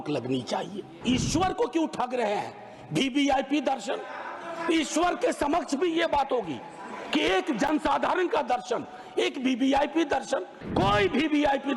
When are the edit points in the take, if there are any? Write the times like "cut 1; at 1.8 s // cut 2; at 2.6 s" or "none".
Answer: cut 1; at 0.9 s // cut 2; at 10.6 s